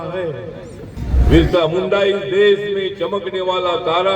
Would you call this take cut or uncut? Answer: cut